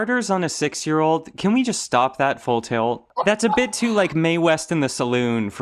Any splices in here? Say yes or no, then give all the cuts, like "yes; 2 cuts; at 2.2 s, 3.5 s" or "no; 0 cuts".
no; 0 cuts